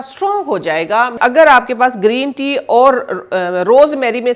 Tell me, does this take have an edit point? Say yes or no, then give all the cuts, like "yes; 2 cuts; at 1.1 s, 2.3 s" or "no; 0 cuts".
yes; 1 cut; at 1.2 s